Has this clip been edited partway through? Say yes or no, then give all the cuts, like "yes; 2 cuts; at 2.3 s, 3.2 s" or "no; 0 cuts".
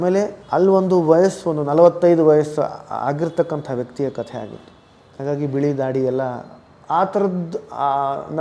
no; 0 cuts